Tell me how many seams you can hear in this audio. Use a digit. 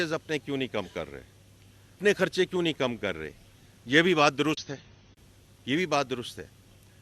1